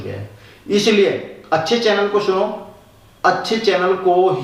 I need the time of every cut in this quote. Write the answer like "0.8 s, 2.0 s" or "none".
none